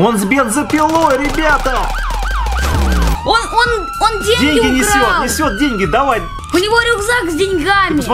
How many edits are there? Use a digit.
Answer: 2